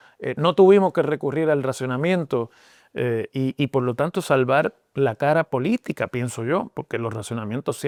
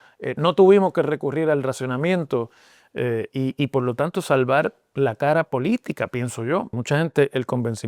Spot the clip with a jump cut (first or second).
second